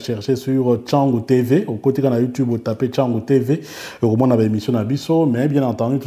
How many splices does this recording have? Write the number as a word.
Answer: zero